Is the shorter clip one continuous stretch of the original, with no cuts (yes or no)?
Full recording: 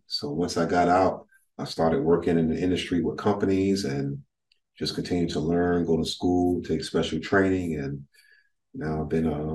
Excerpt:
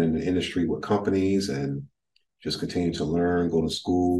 yes